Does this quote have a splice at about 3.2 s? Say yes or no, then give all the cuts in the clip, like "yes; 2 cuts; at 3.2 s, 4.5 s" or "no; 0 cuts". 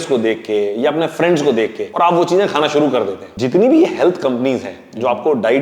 yes; 2 cuts; at 1.8 s, 3.2 s